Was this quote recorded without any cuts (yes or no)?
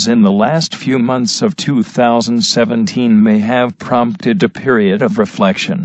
no